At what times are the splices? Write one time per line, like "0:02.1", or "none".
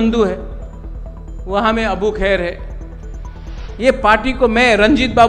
none